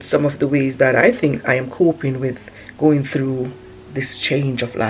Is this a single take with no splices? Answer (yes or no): yes